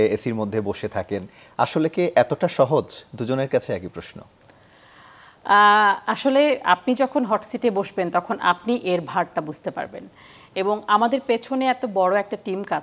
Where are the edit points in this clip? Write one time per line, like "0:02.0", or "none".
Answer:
none